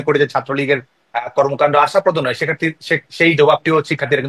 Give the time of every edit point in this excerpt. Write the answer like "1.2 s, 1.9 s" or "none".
none